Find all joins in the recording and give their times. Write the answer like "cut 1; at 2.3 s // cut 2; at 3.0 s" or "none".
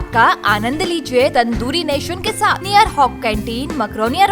cut 1; at 1.3 s // cut 2; at 2.6 s